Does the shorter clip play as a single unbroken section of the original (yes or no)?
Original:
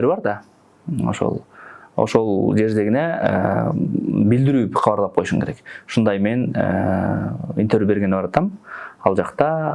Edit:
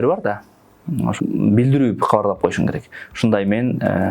no